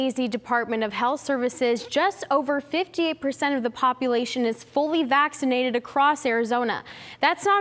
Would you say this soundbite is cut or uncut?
uncut